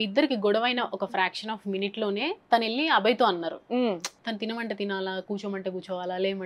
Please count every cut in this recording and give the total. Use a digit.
1